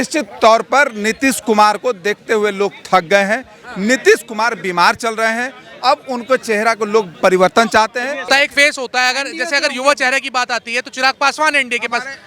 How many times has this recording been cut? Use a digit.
1